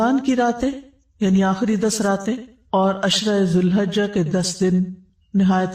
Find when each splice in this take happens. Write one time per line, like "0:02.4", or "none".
none